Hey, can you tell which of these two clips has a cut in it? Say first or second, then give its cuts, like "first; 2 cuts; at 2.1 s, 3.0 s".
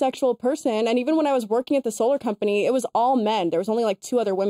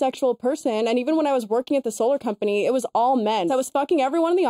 second; 1 cut; at 3.5 s